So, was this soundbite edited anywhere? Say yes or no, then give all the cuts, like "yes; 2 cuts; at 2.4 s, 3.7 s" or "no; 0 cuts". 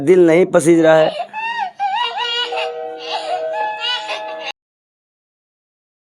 no; 0 cuts